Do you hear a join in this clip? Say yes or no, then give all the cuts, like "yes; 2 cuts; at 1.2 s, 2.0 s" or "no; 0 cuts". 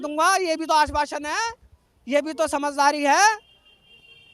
no; 0 cuts